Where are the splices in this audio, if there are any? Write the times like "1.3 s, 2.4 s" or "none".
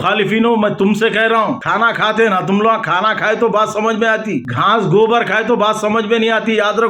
1.6 s, 4.5 s